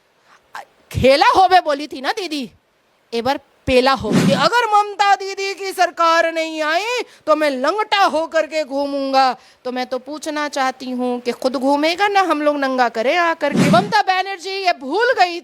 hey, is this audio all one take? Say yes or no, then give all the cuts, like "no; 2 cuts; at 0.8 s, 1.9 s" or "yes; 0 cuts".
no; 2 cuts; at 4.1 s, 13.6 s